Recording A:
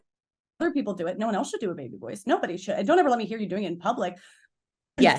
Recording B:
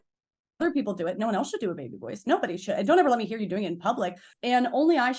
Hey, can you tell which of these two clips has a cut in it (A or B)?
B